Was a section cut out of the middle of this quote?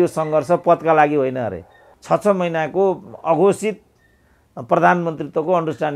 yes; 1 cut; at 1.9 s

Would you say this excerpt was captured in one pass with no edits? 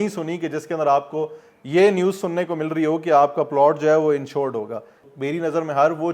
no; 1 cut; at 5.0 s

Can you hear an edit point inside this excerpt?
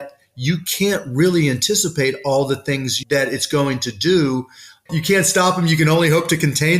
yes; 2 cuts; at 2.9 s, 4.7 s

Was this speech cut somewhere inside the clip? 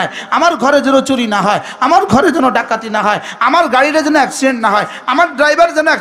no; 0 cuts

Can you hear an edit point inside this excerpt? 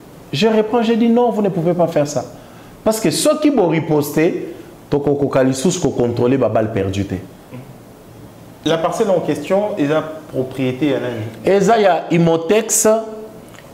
yes; 1 cut; at 8.6 s

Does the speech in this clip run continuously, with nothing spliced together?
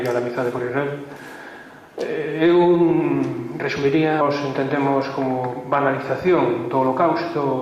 yes; 0 cuts

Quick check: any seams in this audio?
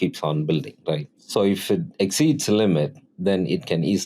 yes; 2 cuts; at 1.1 s, 3.0 s

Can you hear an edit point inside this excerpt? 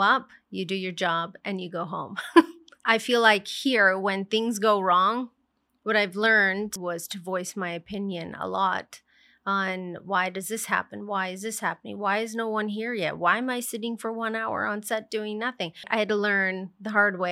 yes; 3 cuts; at 2.7 s, 6.8 s, 15.8 s

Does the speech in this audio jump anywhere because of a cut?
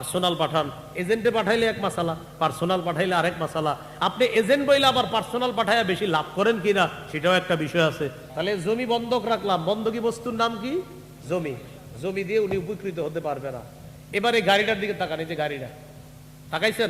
yes; 1 cut; at 8.2 s

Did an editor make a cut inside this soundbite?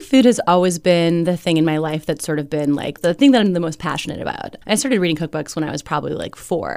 yes; 2 cuts; at 3.0 s, 4.5 s

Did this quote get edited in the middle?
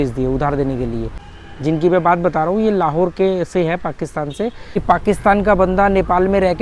yes; 2 cuts; at 1.2 s, 4.8 s

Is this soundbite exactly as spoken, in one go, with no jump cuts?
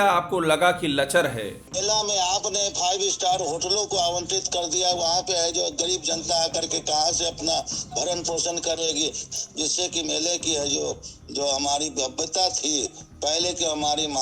no; 2 cuts; at 1.6 s, 9.2 s

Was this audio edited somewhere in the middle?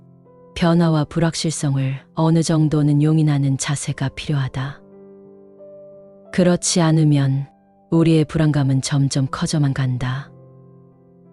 yes; 1 cut; at 10.2 s

